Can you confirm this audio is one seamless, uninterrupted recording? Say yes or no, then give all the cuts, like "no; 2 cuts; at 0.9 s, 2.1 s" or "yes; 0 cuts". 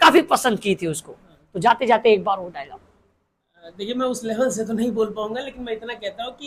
yes; 0 cuts